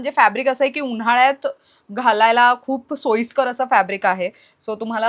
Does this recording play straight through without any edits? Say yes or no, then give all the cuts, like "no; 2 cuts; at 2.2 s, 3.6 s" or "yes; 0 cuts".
yes; 0 cuts